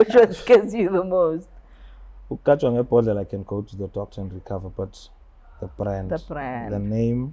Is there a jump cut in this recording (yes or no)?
no